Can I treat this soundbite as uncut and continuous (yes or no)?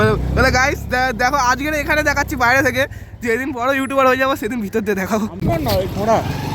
no